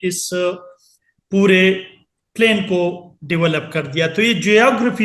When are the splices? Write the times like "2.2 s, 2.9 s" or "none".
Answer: none